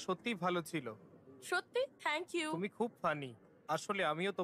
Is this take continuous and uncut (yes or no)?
yes